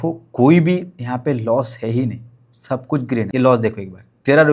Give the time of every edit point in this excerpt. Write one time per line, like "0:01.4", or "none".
0:03.3